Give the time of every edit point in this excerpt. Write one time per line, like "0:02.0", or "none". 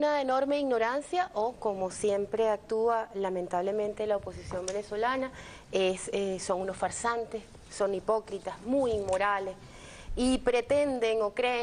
none